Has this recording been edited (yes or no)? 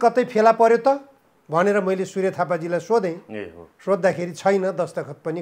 no